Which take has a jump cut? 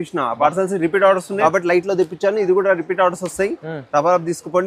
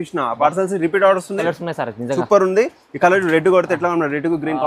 second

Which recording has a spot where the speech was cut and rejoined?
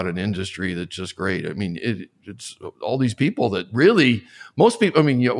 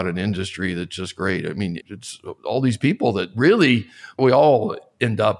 second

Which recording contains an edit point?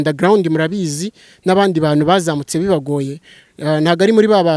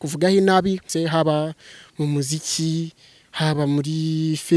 second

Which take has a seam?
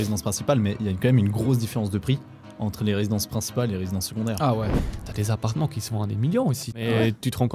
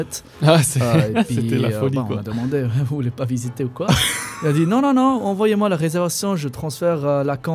first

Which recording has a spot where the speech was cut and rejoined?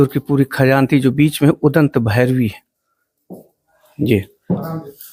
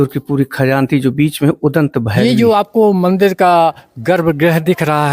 second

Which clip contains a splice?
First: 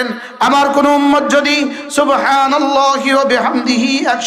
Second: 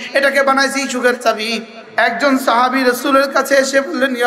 second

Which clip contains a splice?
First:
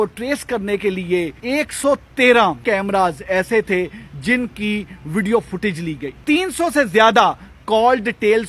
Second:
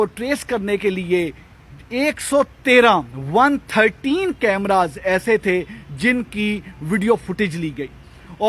first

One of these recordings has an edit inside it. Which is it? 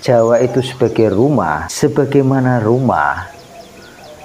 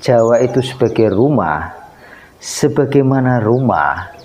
first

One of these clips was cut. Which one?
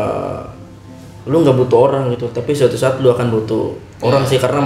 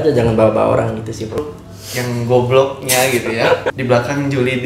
second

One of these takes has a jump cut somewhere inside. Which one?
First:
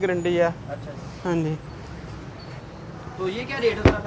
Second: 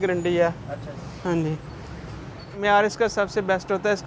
second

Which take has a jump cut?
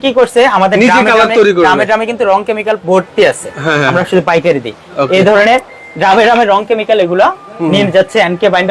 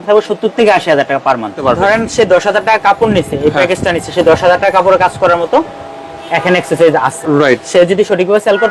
second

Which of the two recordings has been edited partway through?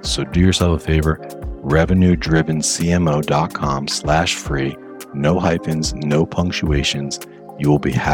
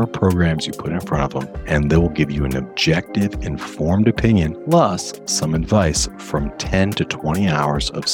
second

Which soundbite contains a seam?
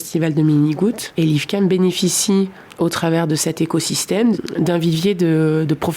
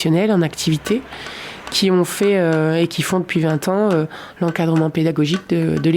first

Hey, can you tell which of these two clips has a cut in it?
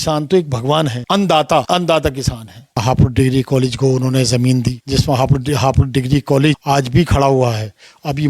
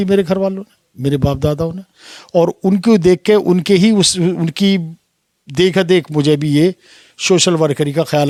first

